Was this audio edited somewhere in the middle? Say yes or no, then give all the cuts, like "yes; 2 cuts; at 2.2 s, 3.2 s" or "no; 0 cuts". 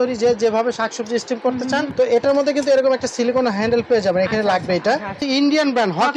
yes; 2 cuts; at 1.9 s, 5.2 s